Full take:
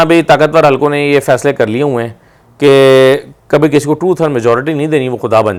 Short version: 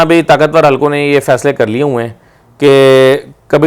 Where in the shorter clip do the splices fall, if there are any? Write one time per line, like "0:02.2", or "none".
none

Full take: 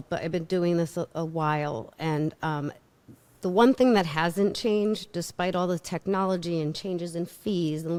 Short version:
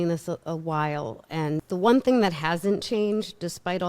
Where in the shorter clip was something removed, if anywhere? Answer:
0:01.6

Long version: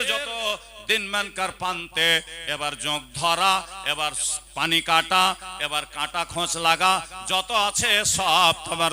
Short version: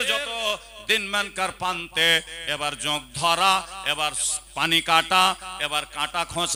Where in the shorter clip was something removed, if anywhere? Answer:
none

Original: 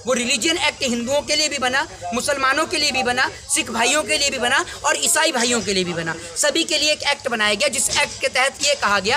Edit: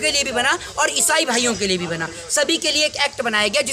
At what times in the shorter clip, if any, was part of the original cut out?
none

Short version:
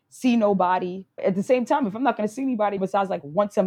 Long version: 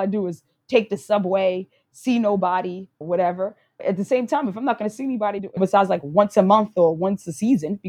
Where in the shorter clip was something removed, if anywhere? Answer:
0:01.0
0:02.8

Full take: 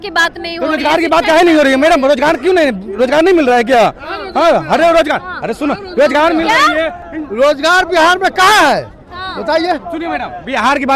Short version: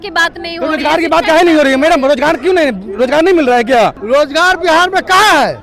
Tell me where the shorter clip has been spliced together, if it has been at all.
0:04.0

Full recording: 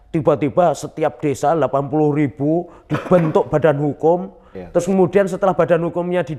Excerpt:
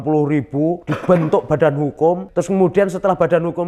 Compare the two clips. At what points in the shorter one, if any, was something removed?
0:00.9
0:02.3

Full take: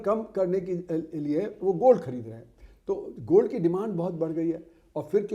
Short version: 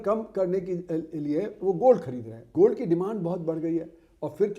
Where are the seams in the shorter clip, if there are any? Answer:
0:02.4

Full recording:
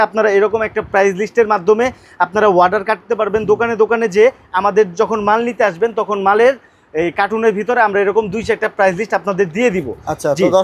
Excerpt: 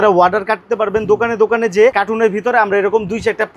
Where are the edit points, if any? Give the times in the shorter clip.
0:02.0

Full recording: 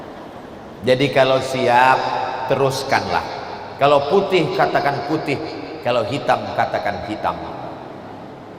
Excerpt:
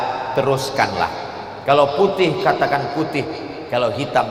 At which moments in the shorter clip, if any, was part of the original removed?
none

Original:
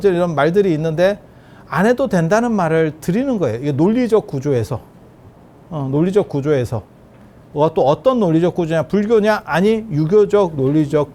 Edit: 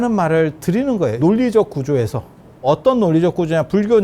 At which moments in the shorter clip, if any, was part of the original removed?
0:01.2
0:02.6

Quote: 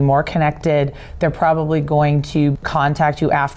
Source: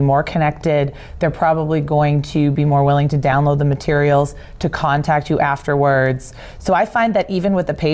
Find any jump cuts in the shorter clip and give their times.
0:02.6

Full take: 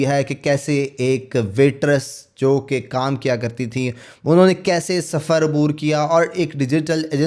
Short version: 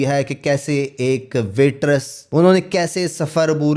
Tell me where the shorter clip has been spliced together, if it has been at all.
0:02.2

